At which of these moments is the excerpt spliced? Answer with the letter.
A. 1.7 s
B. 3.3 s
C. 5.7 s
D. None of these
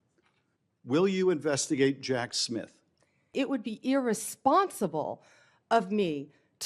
B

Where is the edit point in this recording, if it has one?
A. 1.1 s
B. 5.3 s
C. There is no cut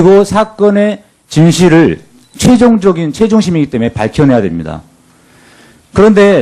B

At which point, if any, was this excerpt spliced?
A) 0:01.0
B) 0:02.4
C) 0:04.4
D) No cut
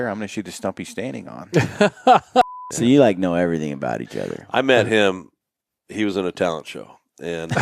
B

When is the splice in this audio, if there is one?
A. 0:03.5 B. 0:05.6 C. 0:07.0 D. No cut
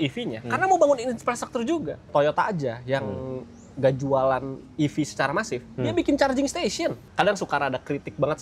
C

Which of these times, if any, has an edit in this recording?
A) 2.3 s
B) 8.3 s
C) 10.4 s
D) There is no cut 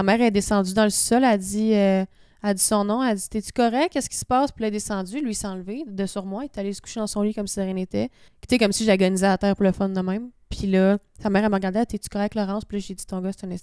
B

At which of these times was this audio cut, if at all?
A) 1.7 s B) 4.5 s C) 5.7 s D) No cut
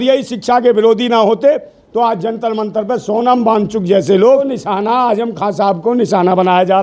B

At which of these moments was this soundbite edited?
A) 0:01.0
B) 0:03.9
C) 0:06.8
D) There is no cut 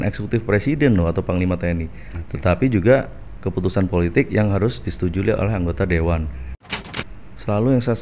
C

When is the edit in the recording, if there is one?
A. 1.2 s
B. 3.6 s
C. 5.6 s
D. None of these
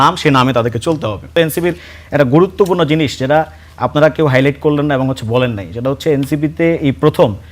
A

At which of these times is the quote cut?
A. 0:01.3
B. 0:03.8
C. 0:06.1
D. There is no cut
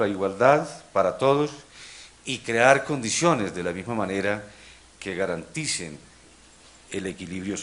A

